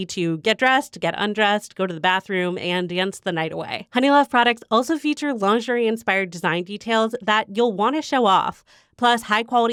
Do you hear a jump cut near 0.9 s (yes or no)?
no